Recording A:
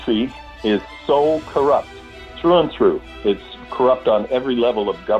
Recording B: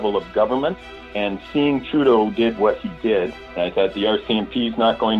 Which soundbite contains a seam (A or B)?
B